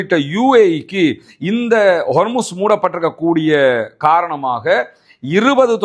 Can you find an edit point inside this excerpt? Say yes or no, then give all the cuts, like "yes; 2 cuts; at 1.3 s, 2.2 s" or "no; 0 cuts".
no; 0 cuts